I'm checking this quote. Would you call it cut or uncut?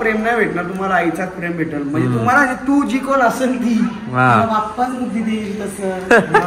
uncut